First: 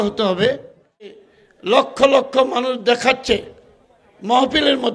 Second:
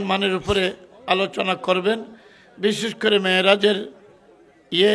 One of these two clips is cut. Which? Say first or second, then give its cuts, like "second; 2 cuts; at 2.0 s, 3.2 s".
first; 1 cut; at 1.2 s